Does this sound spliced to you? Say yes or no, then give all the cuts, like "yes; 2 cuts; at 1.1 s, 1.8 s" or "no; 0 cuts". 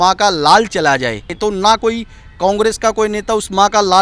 yes; 1 cut; at 1.3 s